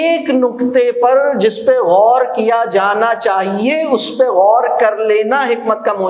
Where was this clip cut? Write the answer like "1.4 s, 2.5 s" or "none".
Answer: none